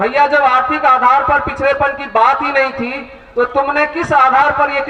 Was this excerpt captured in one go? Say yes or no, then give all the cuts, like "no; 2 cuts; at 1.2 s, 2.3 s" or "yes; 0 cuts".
yes; 0 cuts